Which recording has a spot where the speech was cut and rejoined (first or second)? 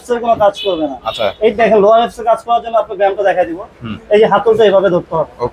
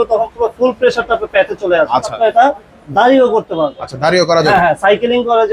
second